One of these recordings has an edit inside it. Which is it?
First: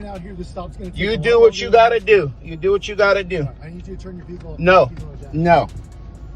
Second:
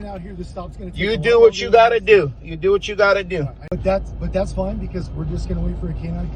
second; 1 cut; at 3.7 s

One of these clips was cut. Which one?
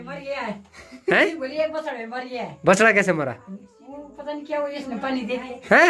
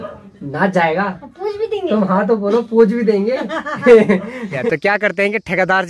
second; 1 cut; at 4.6 s

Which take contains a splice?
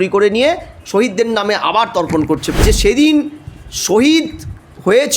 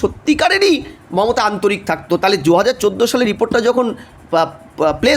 first; 1 cut; at 2.6 s

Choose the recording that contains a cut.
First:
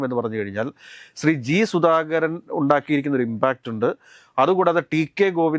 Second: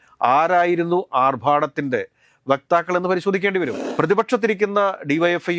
second; 1 cut; at 3.8 s

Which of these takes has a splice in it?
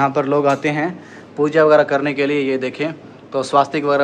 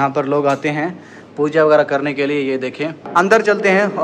second; 1 cut; at 3.1 s

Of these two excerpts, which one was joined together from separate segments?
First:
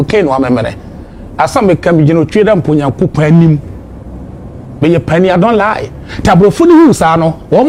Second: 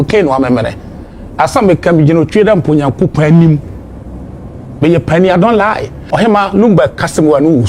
second; 1 cut; at 5.9 s

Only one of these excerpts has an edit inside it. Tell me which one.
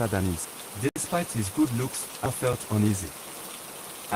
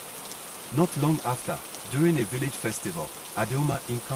first; 2 cuts; at 1.0 s, 2.3 s

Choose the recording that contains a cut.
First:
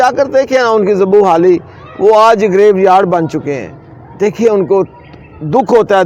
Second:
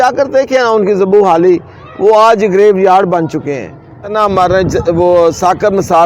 second; 1 cut; at 4.1 s

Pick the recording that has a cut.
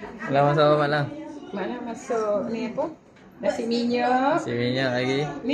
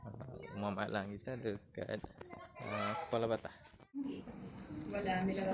second; 1 cut; at 3.9 s

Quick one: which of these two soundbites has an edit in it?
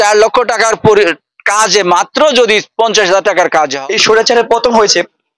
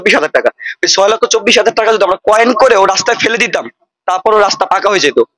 first; 1 cut; at 3.7 s

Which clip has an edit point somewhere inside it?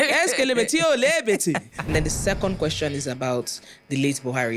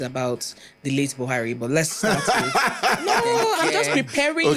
first; 1 cut; at 1.9 s

